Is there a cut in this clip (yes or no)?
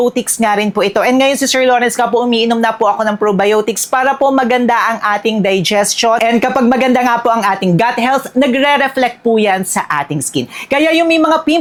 no